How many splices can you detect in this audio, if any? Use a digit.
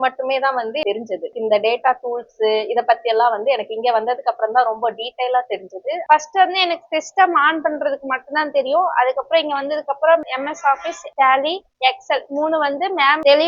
2